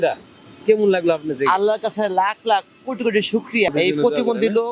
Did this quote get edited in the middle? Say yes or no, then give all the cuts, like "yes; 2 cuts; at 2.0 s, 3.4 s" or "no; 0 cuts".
yes; 1 cut; at 3.7 s